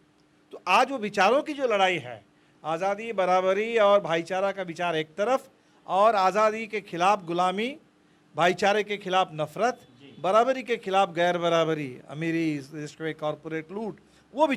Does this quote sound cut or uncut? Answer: uncut